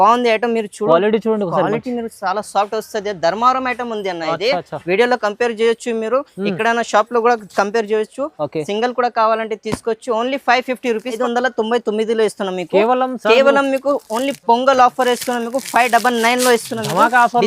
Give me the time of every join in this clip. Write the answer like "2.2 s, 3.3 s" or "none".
11.2 s